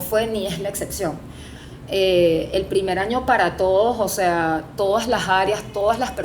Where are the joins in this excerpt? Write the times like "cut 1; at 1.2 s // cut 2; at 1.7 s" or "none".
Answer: cut 1; at 1.6 s